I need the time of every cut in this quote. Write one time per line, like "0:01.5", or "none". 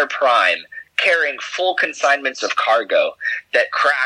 none